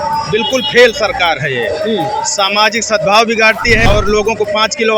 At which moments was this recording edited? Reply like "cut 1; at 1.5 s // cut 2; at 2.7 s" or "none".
cut 1; at 3.9 s